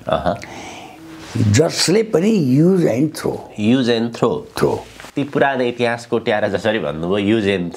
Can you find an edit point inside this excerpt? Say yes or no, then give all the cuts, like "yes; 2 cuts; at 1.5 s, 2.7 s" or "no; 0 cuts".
yes; 1 cut; at 5.0 s